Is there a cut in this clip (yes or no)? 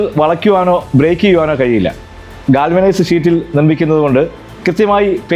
no